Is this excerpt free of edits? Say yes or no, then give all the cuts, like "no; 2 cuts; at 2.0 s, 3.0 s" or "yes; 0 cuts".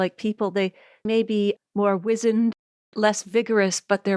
yes; 0 cuts